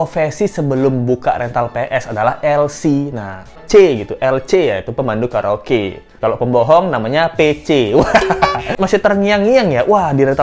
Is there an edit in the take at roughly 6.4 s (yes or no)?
no